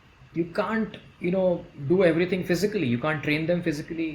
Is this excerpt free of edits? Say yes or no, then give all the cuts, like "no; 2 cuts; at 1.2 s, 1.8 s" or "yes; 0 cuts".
yes; 0 cuts